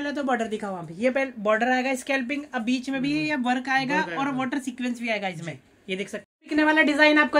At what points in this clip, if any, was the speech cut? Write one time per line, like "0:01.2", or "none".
0:06.2